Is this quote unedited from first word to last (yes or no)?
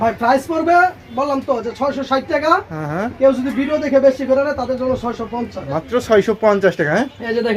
yes